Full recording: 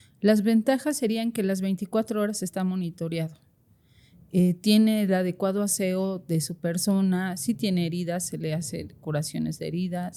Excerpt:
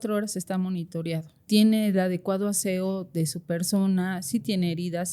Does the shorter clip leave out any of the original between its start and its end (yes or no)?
yes